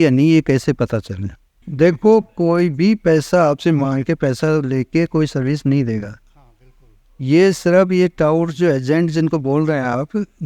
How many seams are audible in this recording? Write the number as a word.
one